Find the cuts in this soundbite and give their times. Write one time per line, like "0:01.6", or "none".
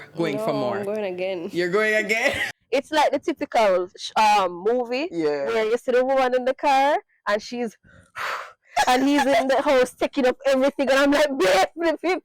0:02.5